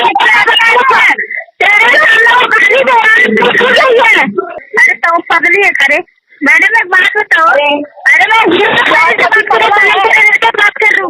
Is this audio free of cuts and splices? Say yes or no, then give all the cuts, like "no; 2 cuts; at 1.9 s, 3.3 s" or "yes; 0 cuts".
no; 1 cut; at 4.5 s